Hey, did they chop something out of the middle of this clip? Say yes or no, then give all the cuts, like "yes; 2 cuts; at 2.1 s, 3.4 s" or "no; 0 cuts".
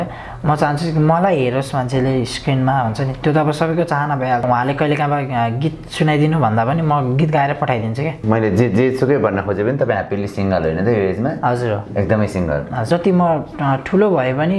yes; 3 cuts; at 4.4 s, 8.2 s, 12.9 s